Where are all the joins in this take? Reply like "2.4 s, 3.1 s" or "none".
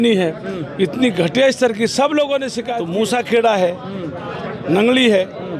2.6 s